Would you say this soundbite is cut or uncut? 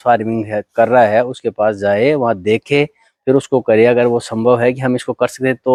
uncut